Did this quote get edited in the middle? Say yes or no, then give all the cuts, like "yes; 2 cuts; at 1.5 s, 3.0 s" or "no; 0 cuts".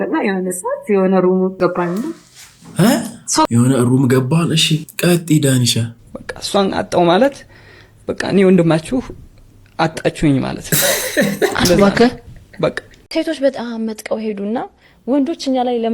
yes; 3 cuts; at 1.5 s, 5.8 s, 13.0 s